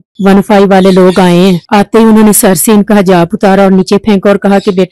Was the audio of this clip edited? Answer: yes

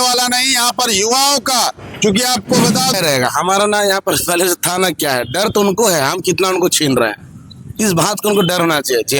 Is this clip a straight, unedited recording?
no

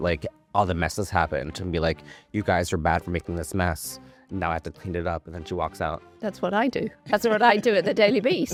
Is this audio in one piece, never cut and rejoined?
yes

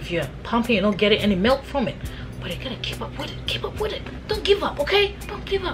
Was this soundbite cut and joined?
no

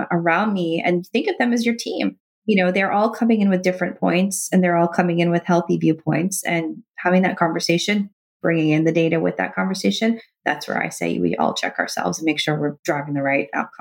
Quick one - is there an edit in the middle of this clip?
yes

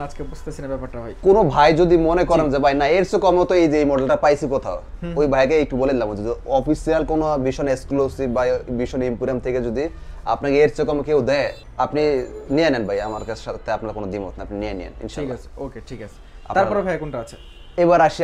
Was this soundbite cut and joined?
no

